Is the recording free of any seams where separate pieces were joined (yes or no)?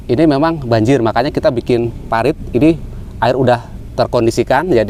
yes